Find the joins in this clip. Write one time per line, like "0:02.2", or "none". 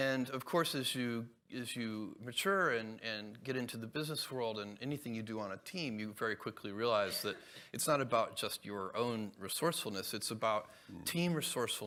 none